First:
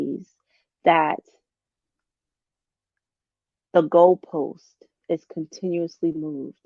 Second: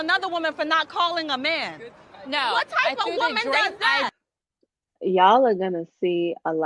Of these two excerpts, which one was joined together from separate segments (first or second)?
second